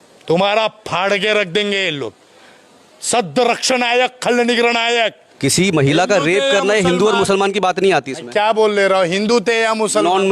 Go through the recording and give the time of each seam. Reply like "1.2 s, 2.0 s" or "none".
5.2 s